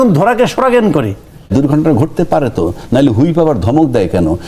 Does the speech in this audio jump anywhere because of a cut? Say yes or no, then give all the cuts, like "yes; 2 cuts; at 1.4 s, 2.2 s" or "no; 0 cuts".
yes; 1 cut; at 1.5 s